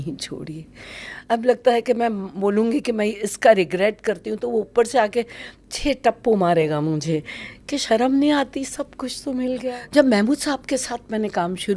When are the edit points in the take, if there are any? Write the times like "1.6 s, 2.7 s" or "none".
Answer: 9.8 s